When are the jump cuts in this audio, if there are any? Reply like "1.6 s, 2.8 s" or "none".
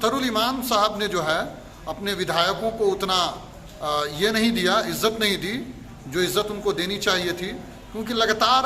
none